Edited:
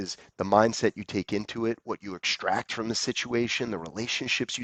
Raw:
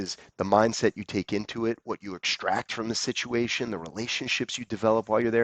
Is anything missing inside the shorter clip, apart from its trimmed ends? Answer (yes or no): no